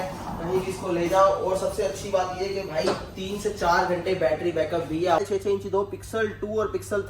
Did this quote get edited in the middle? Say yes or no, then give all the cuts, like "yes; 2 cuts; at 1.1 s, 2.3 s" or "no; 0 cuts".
yes; 1 cut; at 5.2 s